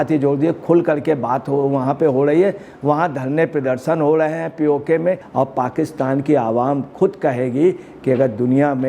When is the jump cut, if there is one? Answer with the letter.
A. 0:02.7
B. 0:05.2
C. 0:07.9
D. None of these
B